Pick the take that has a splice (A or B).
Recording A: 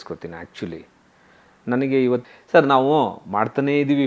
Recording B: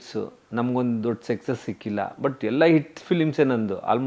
A